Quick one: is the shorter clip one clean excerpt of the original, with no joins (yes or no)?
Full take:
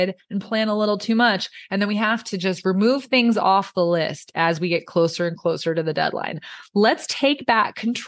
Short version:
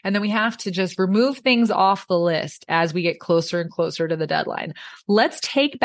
yes